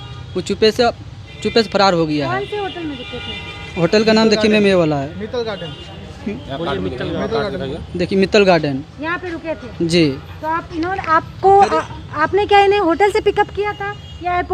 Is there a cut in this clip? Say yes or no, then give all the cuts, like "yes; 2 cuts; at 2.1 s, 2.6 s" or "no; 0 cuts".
no; 0 cuts